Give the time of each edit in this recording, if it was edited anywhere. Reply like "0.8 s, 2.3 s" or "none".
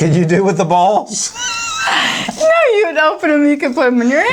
none